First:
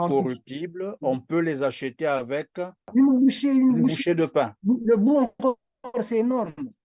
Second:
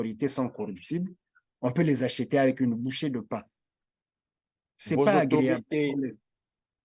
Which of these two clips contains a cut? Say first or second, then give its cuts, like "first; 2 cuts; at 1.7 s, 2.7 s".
first; 1 cut; at 2.8 s